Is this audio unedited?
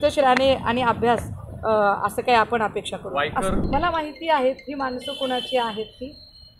no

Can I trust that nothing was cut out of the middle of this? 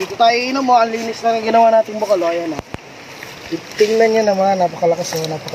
yes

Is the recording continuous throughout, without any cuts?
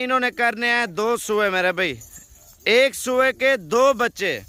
yes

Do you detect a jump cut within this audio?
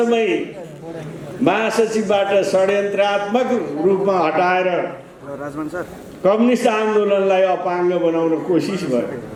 no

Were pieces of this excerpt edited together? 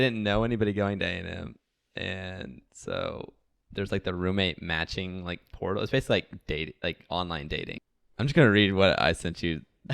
yes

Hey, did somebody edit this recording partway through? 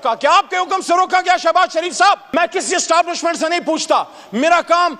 yes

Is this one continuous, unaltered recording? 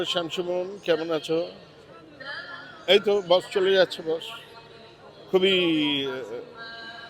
yes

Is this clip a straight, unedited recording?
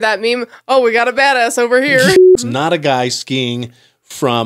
no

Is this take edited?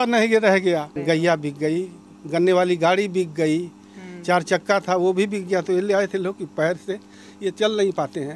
yes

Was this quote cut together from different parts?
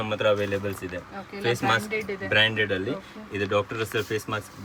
no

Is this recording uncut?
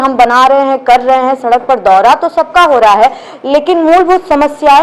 yes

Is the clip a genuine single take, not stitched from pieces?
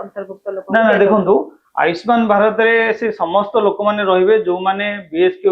yes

